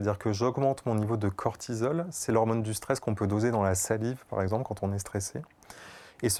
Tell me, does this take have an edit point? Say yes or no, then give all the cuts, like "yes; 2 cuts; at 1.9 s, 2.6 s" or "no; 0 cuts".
no; 0 cuts